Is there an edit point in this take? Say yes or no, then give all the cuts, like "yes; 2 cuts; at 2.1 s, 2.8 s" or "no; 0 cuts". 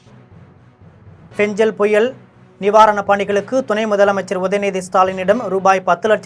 yes; 1 cut; at 0.9 s